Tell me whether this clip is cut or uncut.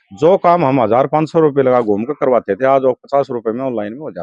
uncut